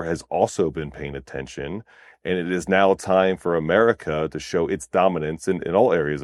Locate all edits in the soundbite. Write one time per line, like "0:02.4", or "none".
none

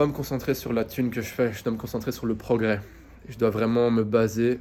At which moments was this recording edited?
none

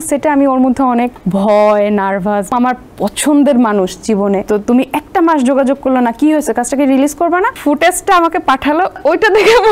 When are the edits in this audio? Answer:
0:01.2
0:02.5
0:04.4
0:07.6
0:09.0

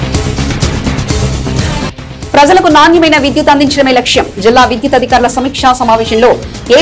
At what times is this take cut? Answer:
0:01.3

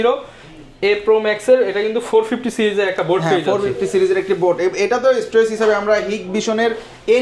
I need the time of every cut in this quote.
none

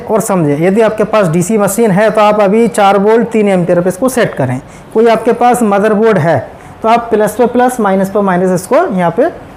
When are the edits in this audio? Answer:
none

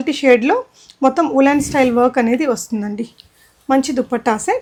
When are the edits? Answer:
none

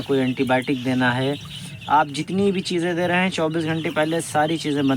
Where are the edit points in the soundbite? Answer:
none

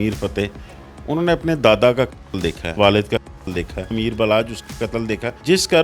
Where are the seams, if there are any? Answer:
0:02.7
0:03.9

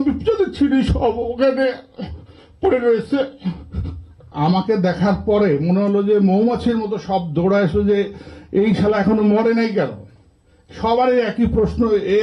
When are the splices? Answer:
0:04.3

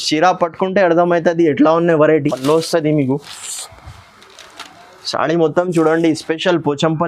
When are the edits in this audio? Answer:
0:02.3

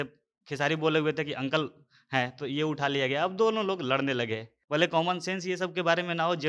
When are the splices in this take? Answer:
0:04.5

